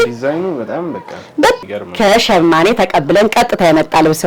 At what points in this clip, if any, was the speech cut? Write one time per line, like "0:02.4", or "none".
0:01.6